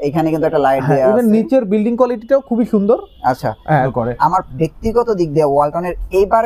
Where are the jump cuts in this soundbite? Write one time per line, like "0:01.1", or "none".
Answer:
0:03.9